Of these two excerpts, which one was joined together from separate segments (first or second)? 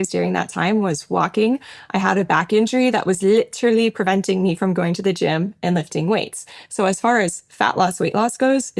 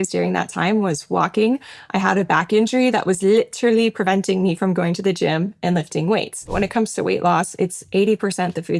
second